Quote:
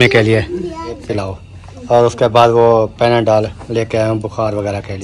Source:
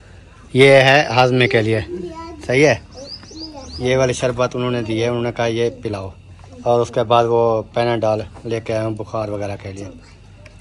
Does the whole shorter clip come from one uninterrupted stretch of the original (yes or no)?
no